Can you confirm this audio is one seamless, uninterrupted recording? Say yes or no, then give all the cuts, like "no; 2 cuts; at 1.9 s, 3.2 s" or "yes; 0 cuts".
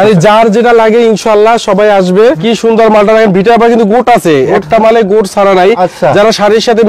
no; 1 cut; at 2.4 s